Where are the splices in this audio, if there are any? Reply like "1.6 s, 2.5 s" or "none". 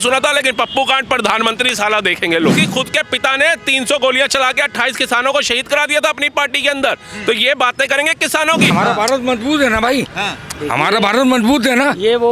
2.6 s, 8.7 s